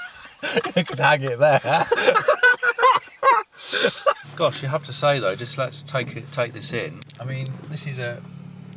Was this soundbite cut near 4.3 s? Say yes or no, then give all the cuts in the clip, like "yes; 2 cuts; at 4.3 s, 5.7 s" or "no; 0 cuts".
yes; 1 cut; at 4.3 s